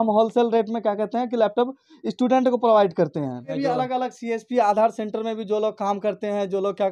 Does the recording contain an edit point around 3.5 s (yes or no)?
yes